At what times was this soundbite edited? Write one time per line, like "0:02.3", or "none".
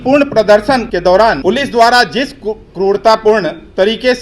0:01.0